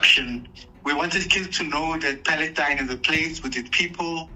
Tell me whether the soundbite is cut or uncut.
uncut